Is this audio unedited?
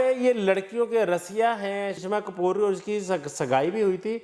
no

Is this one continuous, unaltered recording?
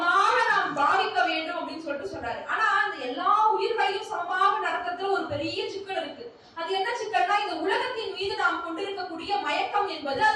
yes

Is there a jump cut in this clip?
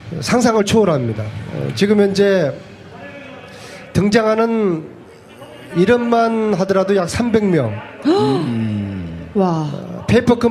yes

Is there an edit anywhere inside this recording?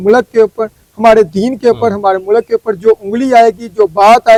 no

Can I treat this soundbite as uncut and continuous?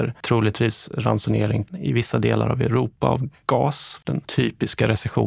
no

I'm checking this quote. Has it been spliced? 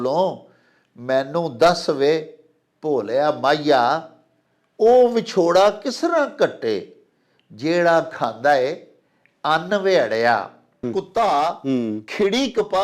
yes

